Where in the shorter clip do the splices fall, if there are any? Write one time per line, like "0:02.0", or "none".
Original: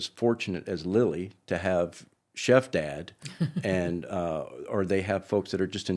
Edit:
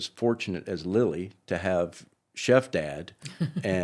none